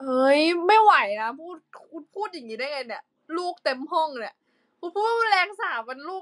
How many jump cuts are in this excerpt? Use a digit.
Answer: 0